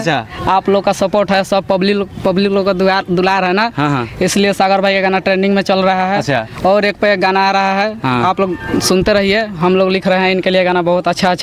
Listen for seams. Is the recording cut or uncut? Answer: uncut